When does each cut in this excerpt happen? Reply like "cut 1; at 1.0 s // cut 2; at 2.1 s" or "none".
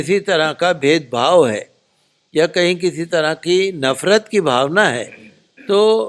none